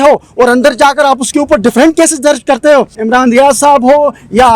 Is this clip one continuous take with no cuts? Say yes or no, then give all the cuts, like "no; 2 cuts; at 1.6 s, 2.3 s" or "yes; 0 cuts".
no; 1 cut; at 3.0 s